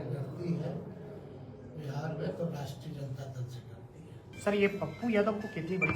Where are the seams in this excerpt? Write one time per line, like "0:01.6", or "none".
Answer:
0:04.3